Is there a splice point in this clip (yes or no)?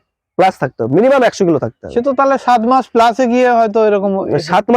no